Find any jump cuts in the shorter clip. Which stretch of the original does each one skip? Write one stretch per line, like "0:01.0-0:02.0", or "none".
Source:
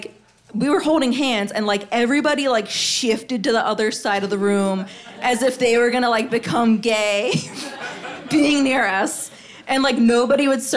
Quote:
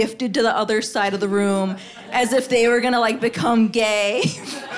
none